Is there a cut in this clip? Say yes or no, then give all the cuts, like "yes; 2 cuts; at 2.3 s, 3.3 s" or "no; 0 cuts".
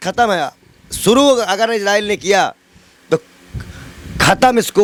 no; 0 cuts